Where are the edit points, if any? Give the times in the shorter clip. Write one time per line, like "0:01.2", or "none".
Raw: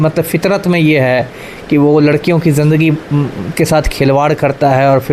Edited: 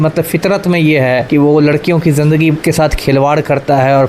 0:01.2
0:02.6

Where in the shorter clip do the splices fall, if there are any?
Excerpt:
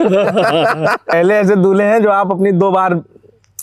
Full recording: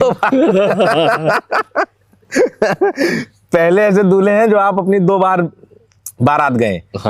0:01.1

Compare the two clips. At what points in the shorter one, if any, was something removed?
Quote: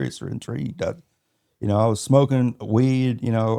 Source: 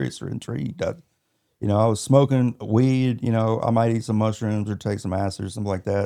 none

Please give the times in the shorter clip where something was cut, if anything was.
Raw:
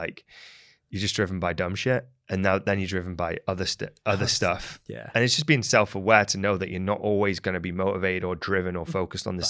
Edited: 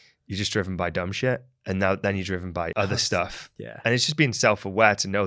0:02.7

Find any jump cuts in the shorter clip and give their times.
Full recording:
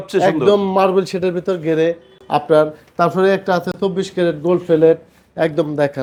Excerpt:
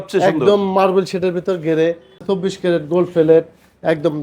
0:02.2

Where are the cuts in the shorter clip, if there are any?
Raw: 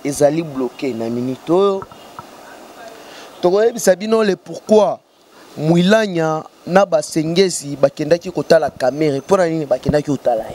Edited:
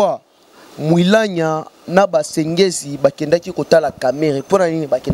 none

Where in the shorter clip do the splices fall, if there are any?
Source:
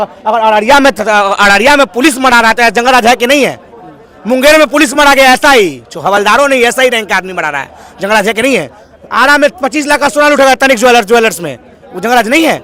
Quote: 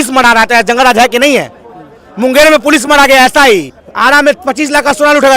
0:03.8

